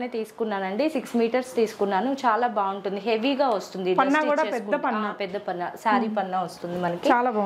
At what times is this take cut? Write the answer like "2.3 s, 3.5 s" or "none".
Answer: none